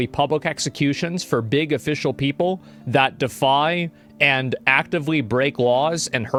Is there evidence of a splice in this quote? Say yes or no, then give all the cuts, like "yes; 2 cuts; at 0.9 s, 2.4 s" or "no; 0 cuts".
no; 0 cuts